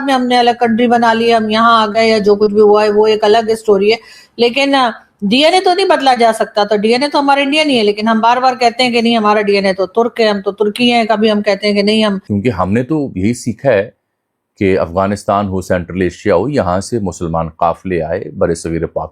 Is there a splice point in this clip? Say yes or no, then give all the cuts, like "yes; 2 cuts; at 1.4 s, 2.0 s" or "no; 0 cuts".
yes; 1 cut; at 12.3 s